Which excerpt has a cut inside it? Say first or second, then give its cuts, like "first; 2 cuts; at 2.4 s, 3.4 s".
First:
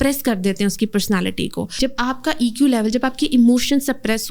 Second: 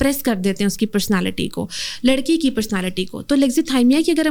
first; 1 cut; at 1.8 s